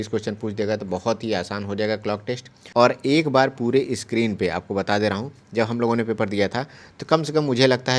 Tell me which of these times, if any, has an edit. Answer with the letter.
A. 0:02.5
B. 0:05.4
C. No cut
A